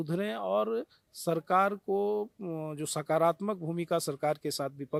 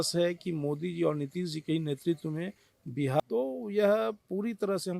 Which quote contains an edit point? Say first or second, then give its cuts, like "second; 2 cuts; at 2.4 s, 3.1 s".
second; 1 cut; at 3.2 s